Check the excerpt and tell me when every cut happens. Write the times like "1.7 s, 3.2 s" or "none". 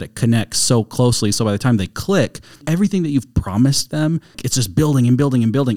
2.6 s, 4.4 s